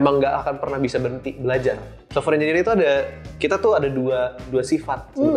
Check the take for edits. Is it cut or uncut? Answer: cut